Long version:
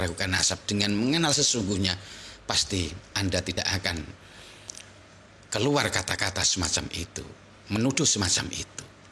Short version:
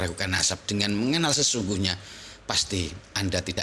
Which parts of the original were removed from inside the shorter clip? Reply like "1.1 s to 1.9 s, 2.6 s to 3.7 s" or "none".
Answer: none